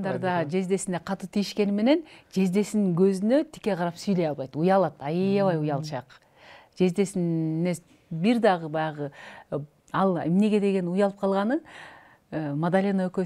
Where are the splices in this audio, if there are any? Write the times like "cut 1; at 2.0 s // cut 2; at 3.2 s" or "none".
none